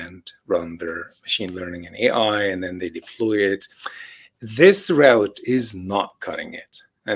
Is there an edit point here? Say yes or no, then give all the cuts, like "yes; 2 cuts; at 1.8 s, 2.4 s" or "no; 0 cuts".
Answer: no; 0 cuts